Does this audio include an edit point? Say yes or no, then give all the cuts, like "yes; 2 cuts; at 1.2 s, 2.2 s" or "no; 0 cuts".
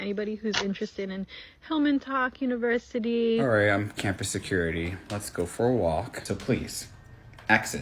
yes; 1 cut; at 6.2 s